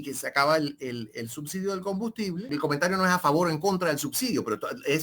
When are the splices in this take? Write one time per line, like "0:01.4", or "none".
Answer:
0:02.5